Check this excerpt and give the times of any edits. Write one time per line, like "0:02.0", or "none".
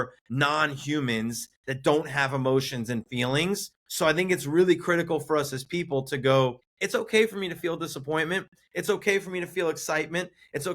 0:03.8
0:06.7